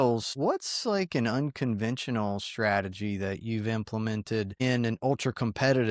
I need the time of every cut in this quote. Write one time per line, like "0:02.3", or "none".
none